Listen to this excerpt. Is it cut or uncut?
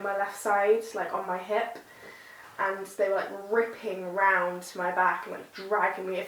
uncut